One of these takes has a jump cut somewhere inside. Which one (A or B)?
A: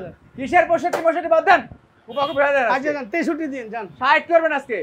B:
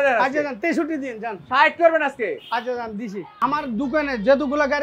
B